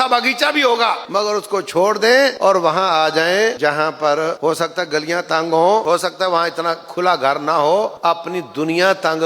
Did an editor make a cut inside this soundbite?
yes; 6 cuts; at 1.0 s, 2.3 s, 3.6 s, 4.4 s, 5.8 s, 7.9 s

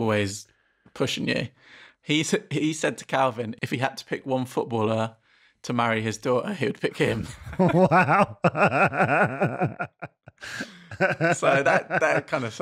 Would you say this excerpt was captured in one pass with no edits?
no; 1 cut; at 3.5 s

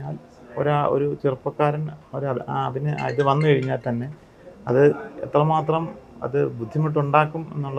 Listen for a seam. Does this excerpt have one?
no; 0 cuts

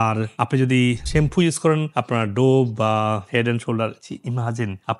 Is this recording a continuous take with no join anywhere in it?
yes; 0 cuts

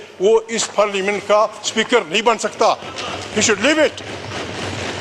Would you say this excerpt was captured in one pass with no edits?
yes; 0 cuts

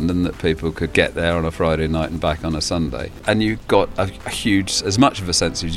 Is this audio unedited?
no; 2 cuts; at 0.9 s, 3.2 s

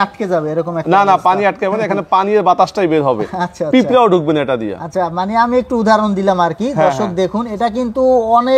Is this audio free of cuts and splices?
yes; 0 cuts

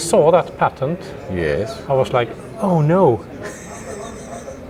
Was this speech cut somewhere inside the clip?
no; 0 cuts

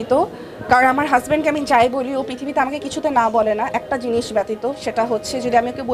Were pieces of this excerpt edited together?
no; 0 cuts

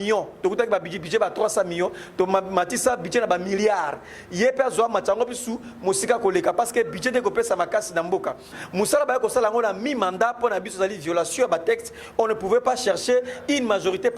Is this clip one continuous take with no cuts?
no; 1 cut; at 8.5 s

